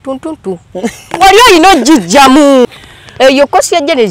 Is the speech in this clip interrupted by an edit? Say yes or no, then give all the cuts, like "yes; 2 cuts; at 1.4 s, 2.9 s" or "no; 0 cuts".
yes; 1 cut; at 2.7 s